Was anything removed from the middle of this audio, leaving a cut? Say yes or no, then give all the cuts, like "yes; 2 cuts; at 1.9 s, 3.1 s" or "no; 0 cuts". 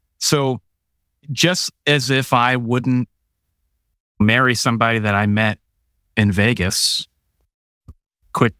no; 0 cuts